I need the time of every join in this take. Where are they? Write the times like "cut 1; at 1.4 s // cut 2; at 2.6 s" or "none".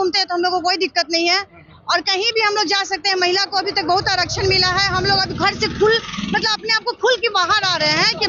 none